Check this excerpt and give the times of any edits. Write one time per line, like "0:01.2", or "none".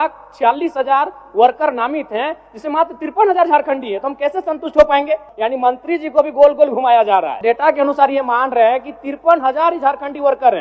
0:05.3
0:07.4